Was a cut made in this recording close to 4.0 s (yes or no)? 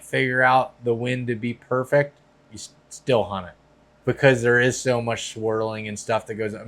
yes